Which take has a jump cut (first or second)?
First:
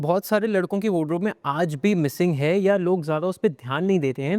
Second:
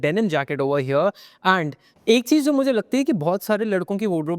second